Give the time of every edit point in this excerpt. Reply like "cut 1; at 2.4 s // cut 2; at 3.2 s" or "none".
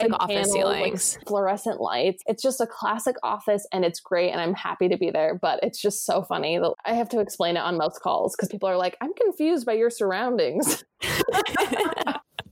cut 1; at 1.2 s // cut 2; at 2.2 s

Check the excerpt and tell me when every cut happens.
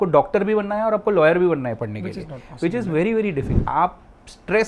cut 1; at 3.6 s

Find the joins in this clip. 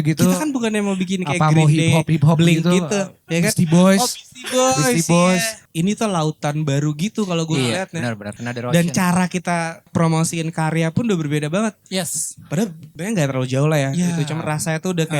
cut 1; at 5.6 s // cut 2; at 8.3 s // cut 3; at 9.9 s // cut 4; at 12.9 s

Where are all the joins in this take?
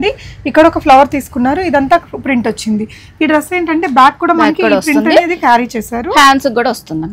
none

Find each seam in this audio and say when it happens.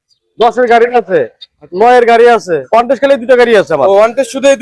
cut 1; at 2.6 s

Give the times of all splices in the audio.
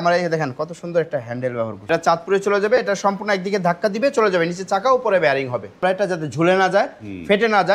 cut 1; at 1.8 s // cut 2; at 5.8 s

